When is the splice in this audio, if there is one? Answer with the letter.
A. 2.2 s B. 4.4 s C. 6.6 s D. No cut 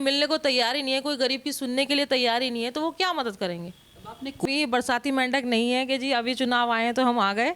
B